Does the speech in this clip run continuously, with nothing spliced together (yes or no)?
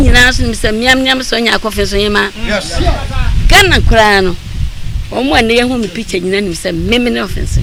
yes